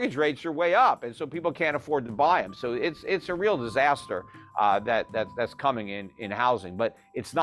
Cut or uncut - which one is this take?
uncut